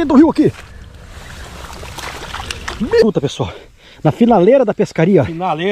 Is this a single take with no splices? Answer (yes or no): no